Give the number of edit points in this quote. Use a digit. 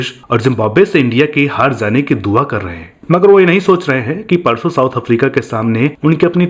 1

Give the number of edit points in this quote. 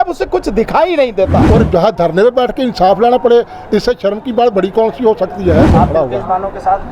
2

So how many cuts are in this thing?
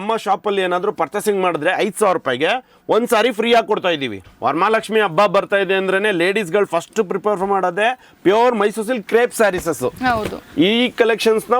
1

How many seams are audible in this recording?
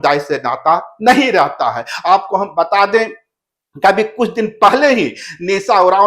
0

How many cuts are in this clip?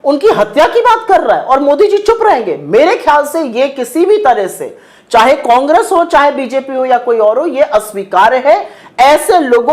0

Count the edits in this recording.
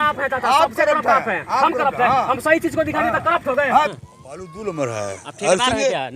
1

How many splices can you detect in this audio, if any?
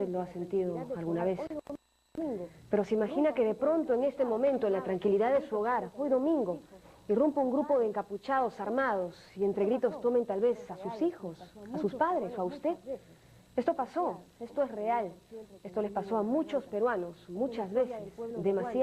1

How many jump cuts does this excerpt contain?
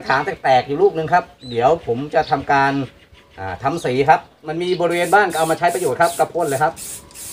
1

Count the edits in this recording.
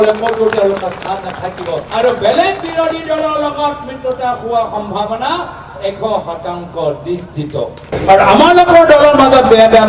2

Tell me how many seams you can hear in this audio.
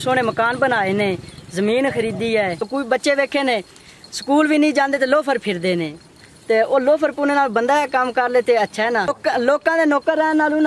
2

